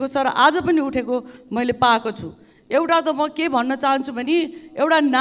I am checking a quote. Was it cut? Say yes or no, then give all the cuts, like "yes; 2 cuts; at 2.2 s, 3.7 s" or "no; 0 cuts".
no; 0 cuts